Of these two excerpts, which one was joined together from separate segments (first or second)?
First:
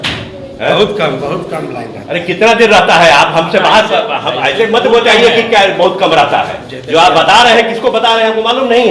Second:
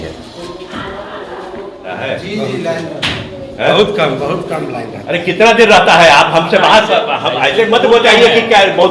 second